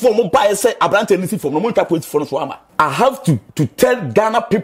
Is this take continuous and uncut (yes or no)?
no